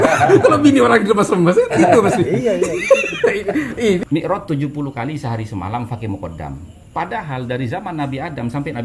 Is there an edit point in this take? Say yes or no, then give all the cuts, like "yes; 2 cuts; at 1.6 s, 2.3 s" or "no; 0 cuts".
yes; 2 cuts; at 4.0 s, 6.7 s